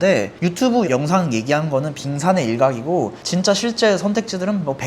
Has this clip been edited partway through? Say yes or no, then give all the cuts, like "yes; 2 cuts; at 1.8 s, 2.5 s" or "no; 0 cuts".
yes; 1 cut; at 3.2 s